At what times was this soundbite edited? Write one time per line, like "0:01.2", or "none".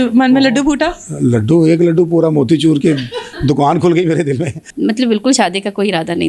0:04.6

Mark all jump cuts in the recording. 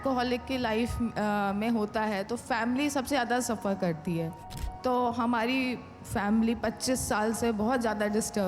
0:04.4

